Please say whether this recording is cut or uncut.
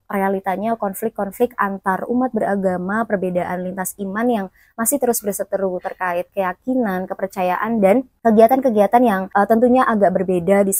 uncut